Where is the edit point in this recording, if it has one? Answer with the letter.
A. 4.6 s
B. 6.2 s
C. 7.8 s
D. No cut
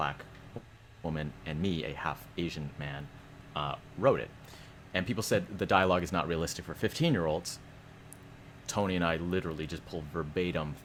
D